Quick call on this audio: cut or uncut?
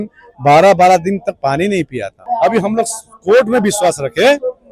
cut